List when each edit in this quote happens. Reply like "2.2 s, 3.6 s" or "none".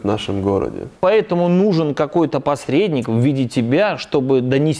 1.0 s